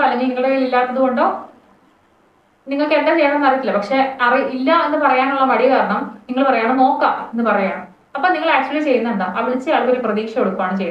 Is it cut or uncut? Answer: uncut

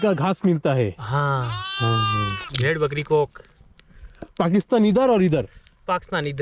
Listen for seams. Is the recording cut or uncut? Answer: uncut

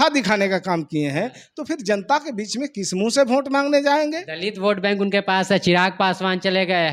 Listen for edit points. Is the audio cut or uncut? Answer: uncut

